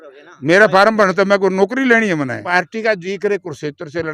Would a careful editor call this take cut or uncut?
cut